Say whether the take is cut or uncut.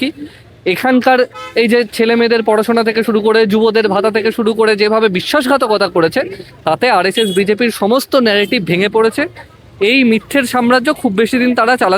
uncut